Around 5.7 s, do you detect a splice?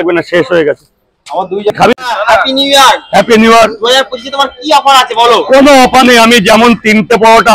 no; 1 cut; at 1.9 s

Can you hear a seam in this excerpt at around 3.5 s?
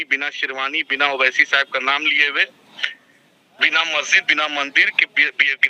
no; 0 cuts

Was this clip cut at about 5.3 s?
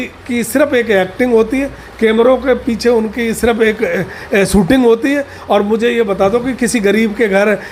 no; 0 cuts

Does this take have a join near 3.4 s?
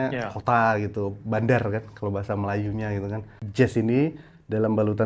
yes; 1 cut; at 3.4 s

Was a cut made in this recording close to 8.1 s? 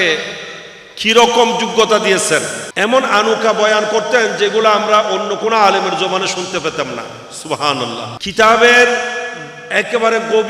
yes; 2 cuts; at 2.6 s, 8.1 s

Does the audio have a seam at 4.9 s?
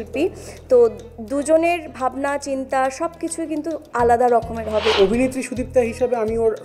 yes; 1 cut; at 4.9 s

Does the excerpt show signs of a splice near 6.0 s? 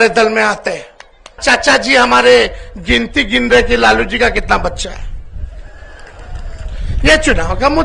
no; 1 cut; at 1.4 s

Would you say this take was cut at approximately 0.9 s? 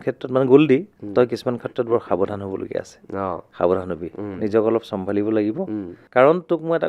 no; 1 cut; at 5.9 s

